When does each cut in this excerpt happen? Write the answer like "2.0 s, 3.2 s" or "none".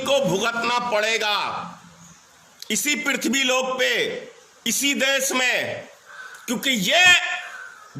none